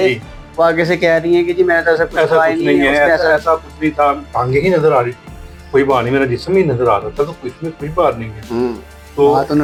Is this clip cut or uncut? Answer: uncut